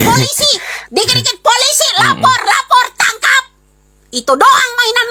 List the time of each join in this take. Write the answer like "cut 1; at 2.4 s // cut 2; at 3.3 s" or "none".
none